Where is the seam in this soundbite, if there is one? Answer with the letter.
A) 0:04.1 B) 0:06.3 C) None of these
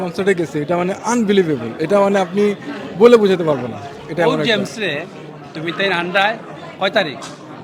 C